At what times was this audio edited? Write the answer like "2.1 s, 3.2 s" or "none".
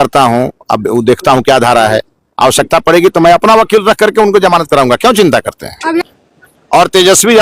6.1 s